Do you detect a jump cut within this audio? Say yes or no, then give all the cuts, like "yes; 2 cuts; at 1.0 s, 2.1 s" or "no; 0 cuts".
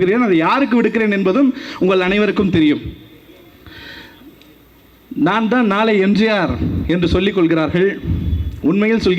no; 0 cuts